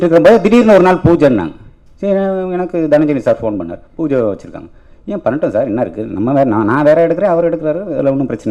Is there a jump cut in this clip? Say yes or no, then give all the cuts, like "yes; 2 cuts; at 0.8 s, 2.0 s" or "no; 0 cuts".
no; 0 cuts